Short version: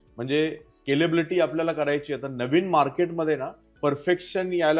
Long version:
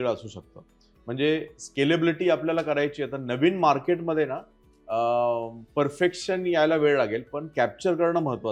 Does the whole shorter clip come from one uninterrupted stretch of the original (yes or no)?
no